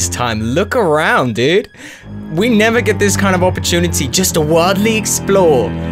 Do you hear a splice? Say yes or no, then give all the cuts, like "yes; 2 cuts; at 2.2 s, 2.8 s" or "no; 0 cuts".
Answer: no; 0 cuts